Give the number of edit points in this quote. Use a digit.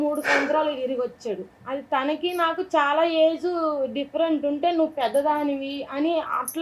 1